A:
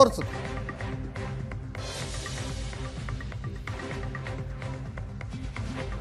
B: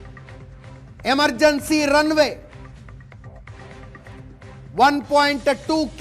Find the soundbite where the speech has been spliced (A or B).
B